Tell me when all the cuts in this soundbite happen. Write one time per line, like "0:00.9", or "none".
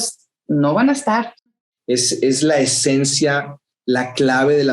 0:01.3

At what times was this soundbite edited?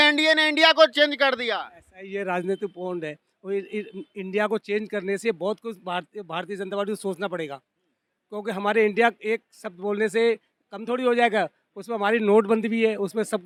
none

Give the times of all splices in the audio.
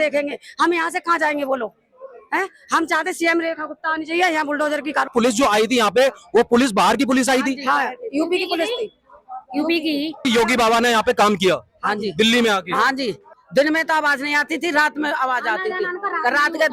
0:05.1
0:10.2
0:13.3

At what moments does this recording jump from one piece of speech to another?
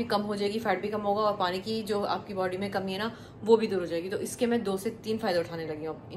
none

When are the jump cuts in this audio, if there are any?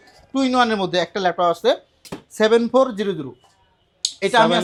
none

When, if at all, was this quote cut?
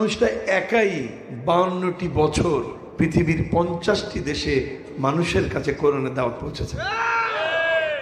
none

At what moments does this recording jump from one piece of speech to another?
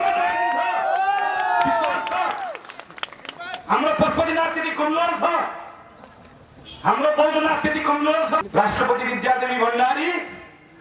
0:08.4

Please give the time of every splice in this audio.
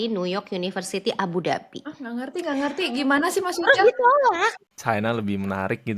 0:04.6

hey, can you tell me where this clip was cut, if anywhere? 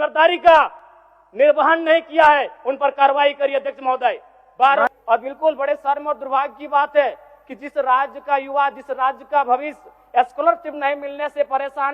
0:04.9

